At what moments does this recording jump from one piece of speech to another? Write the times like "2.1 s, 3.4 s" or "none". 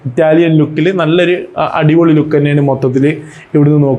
none